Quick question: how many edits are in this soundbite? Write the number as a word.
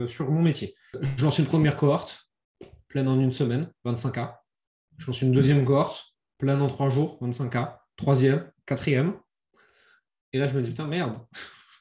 one